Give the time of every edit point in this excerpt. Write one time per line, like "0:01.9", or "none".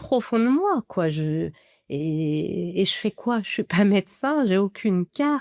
none